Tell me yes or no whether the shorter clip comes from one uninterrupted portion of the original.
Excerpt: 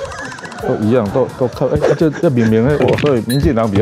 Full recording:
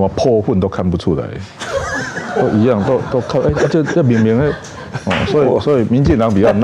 no